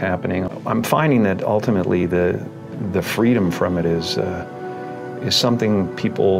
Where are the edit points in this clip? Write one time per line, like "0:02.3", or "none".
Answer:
none